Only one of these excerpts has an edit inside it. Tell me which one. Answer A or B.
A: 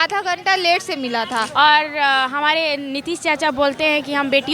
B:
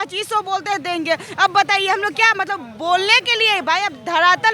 A